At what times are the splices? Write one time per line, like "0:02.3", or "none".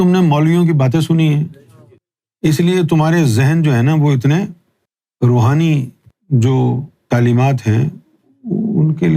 0:07.0